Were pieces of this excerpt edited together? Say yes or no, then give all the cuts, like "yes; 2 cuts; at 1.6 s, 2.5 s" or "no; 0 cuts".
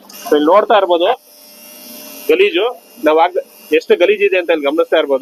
no; 0 cuts